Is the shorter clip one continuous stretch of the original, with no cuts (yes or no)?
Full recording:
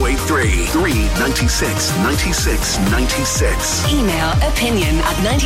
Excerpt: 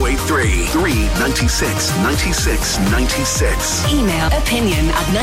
no